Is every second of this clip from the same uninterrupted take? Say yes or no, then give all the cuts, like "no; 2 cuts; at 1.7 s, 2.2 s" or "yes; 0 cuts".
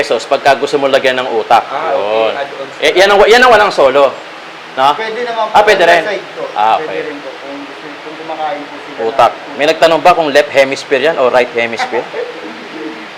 yes; 0 cuts